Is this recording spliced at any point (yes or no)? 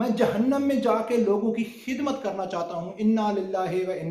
no